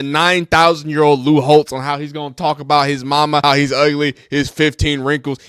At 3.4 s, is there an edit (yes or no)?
yes